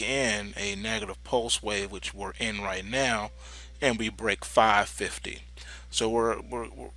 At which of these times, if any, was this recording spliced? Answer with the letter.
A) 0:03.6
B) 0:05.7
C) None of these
C